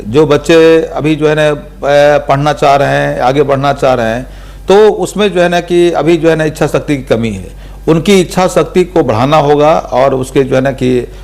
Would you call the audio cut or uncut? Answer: uncut